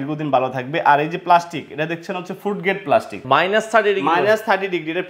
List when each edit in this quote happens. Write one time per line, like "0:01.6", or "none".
0:03.1